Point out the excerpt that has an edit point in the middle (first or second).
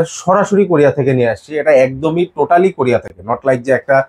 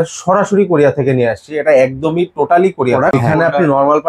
second